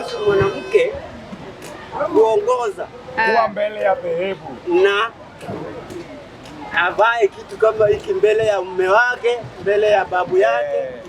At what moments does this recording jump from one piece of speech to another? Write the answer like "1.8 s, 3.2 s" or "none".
none

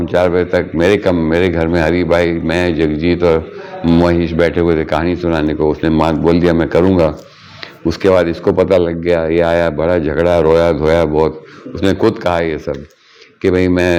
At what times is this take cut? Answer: none

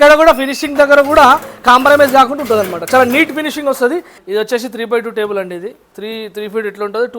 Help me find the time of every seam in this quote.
4.1 s

